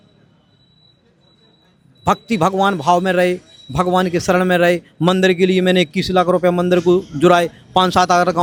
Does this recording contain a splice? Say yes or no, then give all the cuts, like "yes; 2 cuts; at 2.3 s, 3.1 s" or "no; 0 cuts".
no; 0 cuts